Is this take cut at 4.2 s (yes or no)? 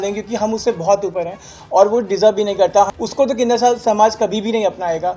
no